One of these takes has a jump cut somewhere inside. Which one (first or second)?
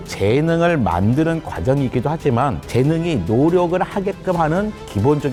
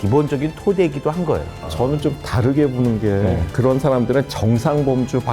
second